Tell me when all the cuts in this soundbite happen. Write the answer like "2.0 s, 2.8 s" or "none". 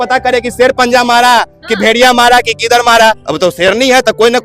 3.3 s

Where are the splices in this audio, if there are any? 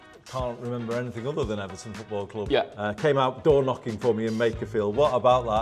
2.4 s

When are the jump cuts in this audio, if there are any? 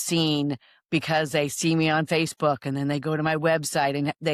none

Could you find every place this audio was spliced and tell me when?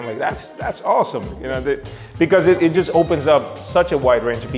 none

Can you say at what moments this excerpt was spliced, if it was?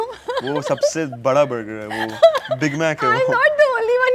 none

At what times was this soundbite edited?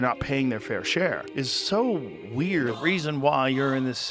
1.2 s, 2.8 s

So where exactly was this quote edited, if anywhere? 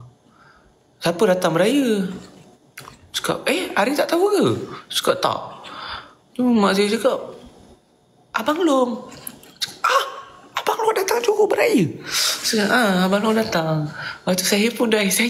none

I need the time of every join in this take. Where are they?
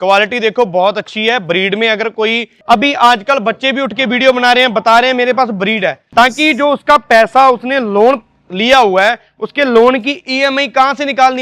2.5 s, 6.0 s

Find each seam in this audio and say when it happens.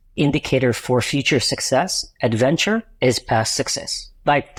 none

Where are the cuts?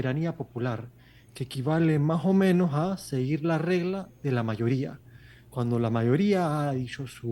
none

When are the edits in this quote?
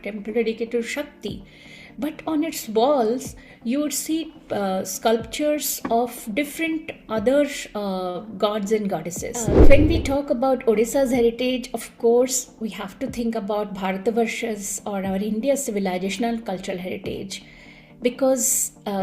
9.4 s

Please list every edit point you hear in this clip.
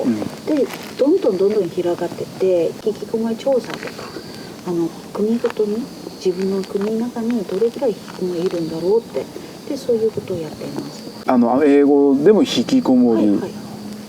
2.8 s, 11.2 s

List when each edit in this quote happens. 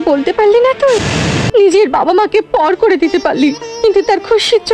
1.4 s

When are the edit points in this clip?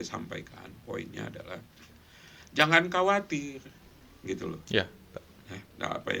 none

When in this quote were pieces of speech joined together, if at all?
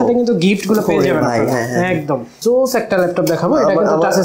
2.3 s

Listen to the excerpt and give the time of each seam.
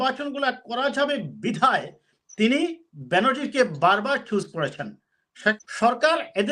5.6 s

